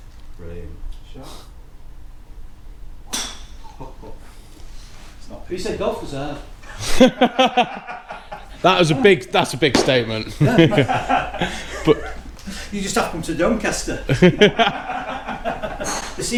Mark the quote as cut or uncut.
uncut